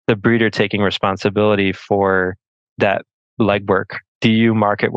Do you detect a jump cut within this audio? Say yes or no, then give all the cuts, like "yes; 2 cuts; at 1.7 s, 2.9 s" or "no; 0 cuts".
yes; 1 cut; at 4.0 s